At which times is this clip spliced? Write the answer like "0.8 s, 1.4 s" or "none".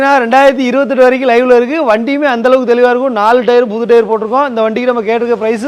none